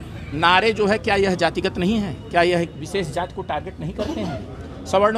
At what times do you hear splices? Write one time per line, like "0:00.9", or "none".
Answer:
none

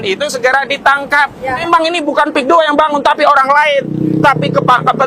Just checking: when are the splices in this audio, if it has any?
0:01.6

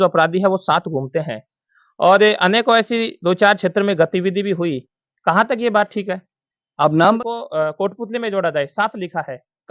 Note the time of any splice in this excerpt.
0:07.2

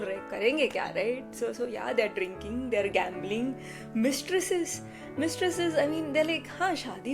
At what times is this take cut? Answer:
none

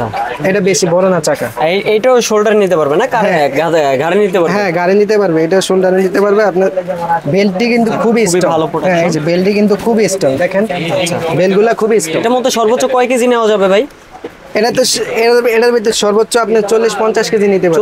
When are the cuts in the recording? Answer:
none

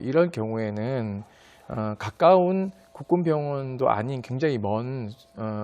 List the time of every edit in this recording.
0:03.1

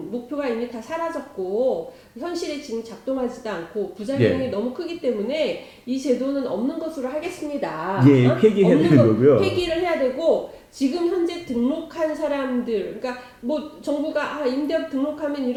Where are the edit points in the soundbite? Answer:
none

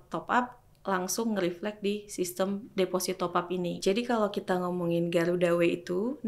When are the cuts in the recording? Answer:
0:03.8

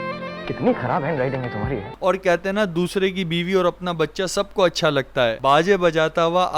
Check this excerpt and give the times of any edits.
0:01.9

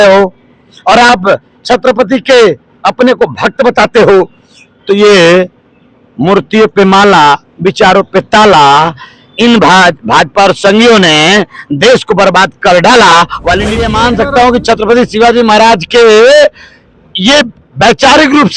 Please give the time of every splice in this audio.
0:13.8

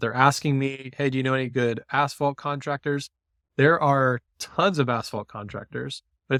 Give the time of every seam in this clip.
none

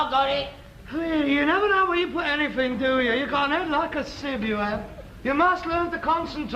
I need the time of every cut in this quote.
0:02.5

